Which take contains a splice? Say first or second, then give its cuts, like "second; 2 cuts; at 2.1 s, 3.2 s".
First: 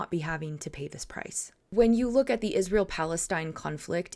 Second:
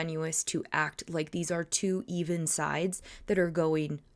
first; 1 cut; at 1.6 s